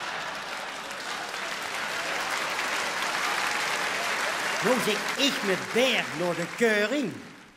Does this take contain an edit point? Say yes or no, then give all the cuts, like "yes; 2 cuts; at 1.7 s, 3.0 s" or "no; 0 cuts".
no; 0 cuts